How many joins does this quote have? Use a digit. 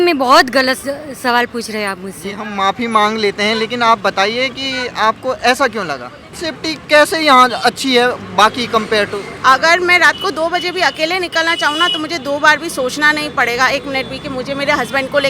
1